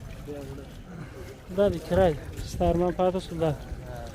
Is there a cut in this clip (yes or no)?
yes